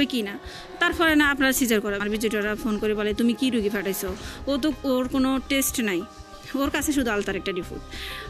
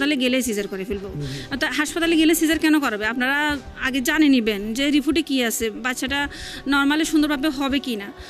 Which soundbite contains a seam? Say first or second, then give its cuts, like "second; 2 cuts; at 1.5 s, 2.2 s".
first; 1 cut; at 2.0 s